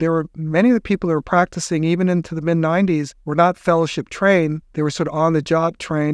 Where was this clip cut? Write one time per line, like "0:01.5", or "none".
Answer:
0:03.2
0:04.6